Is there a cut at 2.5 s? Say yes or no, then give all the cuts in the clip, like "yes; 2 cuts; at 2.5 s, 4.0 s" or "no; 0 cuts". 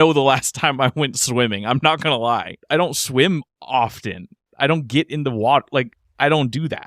yes; 1 cut; at 2.5 s